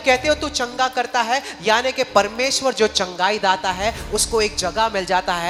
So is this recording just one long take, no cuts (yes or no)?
yes